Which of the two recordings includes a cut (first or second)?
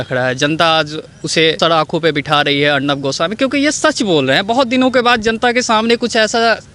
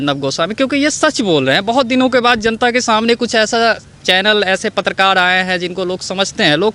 first